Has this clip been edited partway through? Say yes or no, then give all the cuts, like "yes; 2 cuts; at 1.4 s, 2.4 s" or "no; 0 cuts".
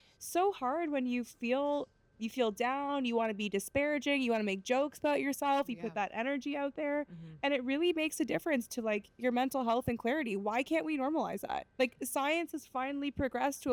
no; 0 cuts